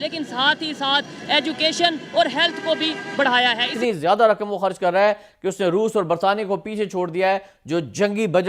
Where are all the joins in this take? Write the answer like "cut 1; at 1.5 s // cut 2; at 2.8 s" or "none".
cut 1; at 3.7 s